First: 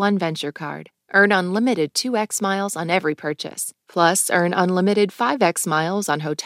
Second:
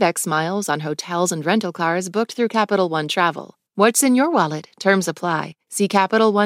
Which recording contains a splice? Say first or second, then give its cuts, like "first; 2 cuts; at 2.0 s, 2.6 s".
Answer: second; 1 cut; at 3.5 s